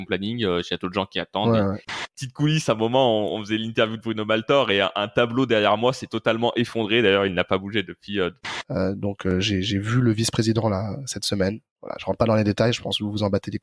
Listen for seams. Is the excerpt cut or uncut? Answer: cut